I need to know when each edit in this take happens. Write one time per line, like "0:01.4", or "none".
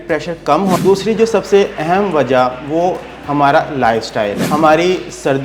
0:00.8
0:04.4